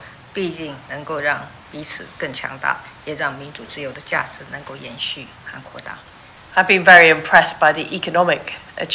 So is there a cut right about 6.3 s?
yes; 1 cut; at 6.3 s

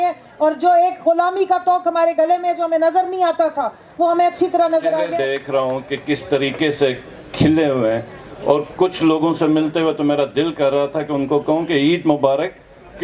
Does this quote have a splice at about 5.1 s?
yes; 1 cut; at 5.1 s

